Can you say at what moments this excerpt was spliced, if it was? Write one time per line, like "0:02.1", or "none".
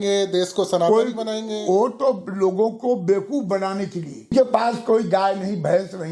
0:04.3

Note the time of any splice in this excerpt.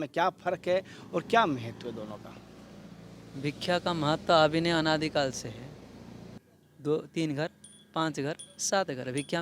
0:06.4

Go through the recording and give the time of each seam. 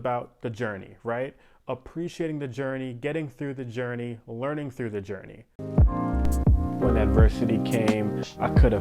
0:05.5

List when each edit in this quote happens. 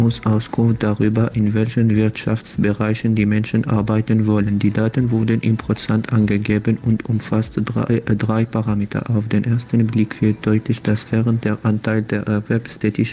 0:09.1
0:10.6

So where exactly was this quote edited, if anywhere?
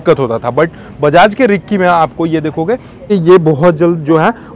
0:03.1

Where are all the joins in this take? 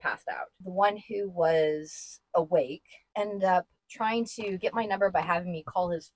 none

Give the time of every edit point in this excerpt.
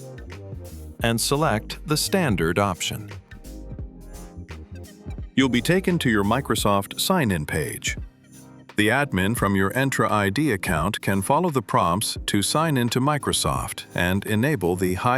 0:01.0

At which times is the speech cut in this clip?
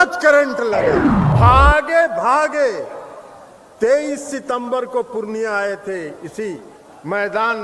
0:01.3

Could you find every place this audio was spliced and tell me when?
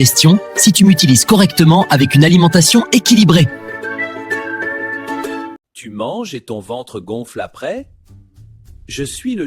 0:05.7

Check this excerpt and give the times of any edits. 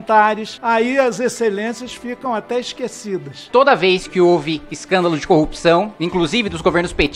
0:03.4

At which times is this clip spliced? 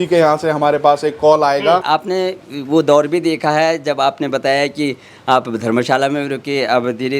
0:01.8

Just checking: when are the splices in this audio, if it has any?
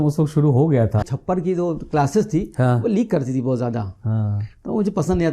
0:01.0

